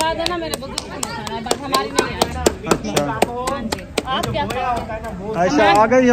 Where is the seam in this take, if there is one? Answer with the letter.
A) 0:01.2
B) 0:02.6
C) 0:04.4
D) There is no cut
D